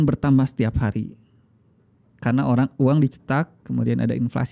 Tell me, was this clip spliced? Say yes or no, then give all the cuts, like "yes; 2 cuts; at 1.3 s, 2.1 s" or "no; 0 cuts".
no; 0 cuts